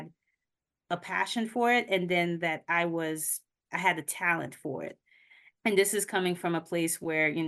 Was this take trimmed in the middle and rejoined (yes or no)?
no